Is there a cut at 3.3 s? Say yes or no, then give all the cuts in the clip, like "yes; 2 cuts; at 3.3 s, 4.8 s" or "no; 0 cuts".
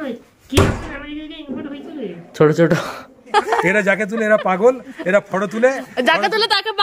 yes; 1 cut; at 3.3 s